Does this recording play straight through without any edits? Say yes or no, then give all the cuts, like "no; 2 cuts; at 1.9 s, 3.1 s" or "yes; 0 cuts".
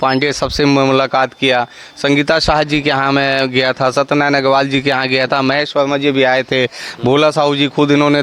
yes; 0 cuts